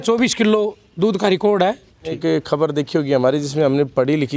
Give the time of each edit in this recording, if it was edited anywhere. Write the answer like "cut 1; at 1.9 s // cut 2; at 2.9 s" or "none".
cut 1; at 2.2 s